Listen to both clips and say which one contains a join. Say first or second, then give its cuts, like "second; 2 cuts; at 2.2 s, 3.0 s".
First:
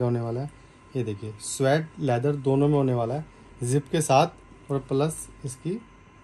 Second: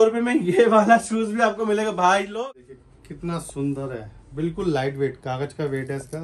second; 1 cut; at 2.4 s